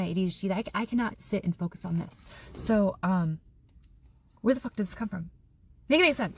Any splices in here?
no; 0 cuts

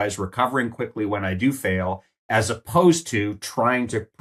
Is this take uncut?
yes; 0 cuts

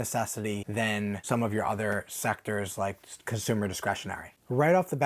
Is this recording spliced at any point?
yes; 1 cut; at 1.0 s

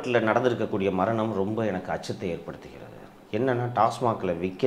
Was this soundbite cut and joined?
no; 0 cuts

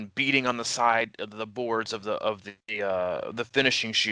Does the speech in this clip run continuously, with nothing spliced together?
yes; 0 cuts

